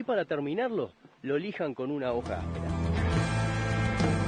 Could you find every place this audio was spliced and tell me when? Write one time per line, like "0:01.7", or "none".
none